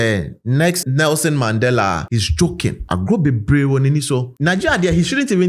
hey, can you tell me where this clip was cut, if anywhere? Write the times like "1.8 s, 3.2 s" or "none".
4.3 s